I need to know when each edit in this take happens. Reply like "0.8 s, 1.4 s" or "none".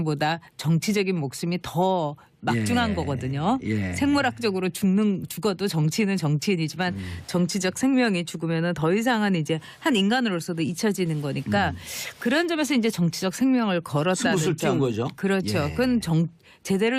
none